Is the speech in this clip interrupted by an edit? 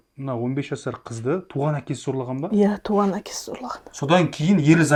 no; 0 cuts

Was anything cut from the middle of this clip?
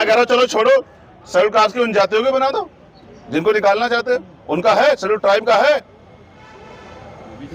no; 0 cuts

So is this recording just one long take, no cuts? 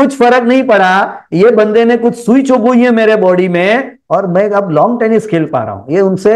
yes; 0 cuts

